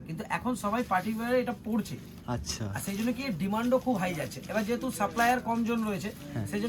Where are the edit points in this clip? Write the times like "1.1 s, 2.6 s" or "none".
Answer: none